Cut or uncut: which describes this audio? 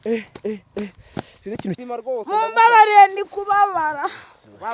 cut